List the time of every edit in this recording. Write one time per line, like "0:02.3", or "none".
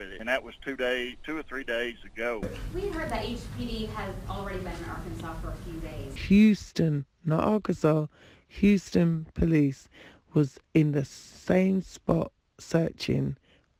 none